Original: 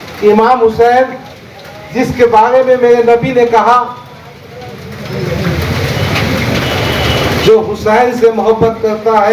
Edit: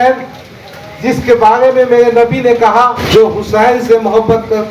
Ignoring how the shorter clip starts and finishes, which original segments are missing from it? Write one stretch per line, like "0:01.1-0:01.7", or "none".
0:03.9-0:07.3